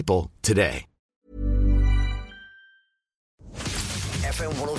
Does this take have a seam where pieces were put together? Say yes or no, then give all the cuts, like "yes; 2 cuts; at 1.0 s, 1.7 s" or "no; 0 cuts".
yes; 1 cut; at 3.3 s